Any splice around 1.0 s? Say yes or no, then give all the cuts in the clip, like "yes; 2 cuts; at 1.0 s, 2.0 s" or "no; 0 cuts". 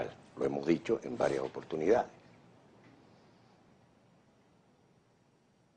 yes; 1 cut; at 1.0 s